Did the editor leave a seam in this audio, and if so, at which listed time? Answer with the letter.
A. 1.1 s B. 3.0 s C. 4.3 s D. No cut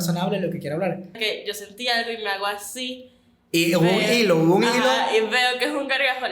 A